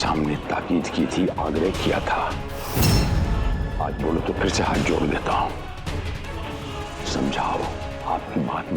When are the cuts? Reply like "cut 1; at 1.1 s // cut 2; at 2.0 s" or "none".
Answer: cut 1; at 6.8 s